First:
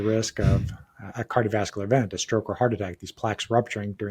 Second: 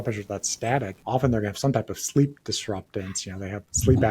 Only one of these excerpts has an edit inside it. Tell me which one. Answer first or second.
second